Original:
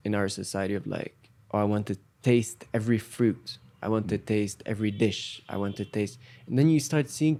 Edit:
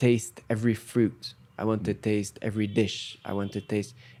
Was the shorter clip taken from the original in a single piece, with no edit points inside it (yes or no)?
yes